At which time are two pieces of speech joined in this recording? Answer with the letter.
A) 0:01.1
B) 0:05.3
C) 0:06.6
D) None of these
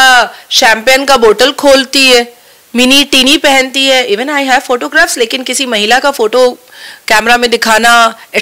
D